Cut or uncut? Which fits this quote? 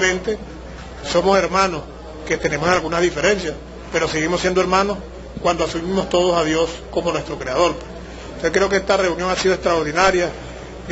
cut